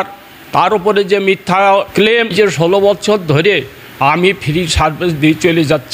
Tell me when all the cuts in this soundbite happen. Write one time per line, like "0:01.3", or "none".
0:02.3